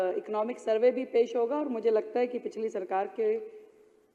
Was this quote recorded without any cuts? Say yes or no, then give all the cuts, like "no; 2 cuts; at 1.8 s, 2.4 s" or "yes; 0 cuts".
yes; 0 cuts